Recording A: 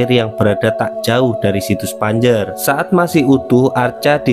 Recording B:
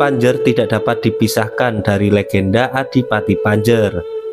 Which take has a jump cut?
A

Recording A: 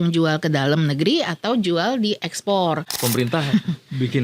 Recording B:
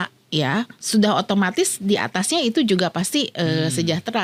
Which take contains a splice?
A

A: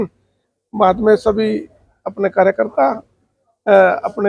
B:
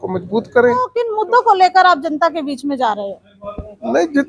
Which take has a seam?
B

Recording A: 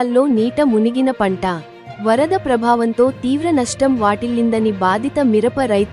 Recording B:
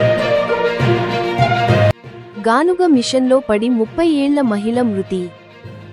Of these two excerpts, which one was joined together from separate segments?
B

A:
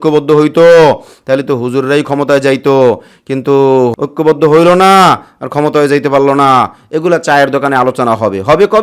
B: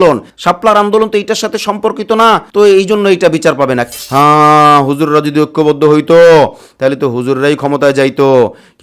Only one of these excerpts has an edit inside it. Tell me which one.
B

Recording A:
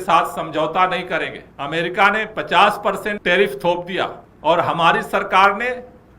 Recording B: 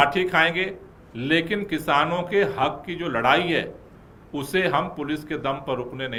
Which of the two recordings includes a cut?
A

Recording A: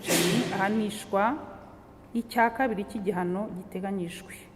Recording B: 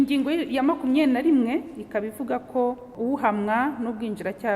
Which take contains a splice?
B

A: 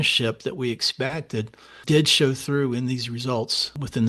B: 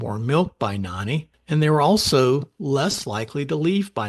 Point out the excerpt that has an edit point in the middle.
B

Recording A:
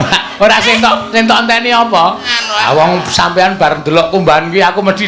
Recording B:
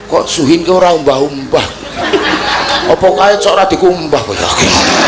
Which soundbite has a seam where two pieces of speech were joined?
A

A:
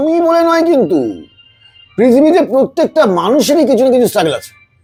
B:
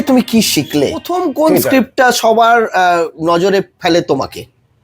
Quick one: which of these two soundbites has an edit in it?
B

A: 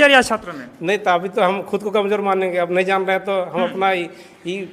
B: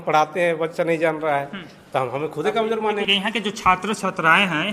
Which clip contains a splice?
B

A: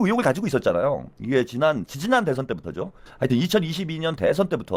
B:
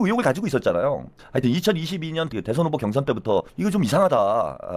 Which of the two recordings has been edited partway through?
B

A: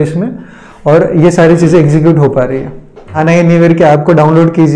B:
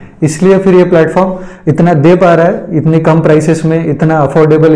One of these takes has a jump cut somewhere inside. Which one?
A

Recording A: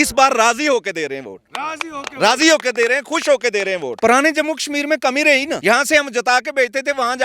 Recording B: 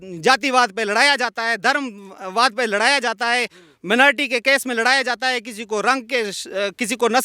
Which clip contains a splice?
A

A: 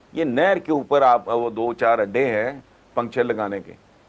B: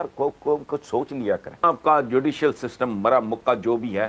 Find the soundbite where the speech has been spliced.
B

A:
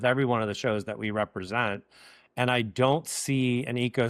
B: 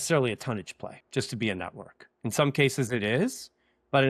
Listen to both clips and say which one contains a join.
B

